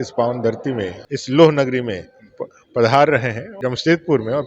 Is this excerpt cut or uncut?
cut